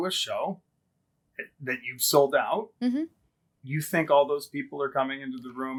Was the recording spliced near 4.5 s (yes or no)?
no